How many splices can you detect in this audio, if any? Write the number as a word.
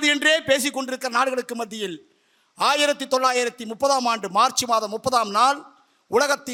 zero